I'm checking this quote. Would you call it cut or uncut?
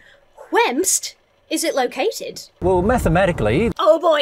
cut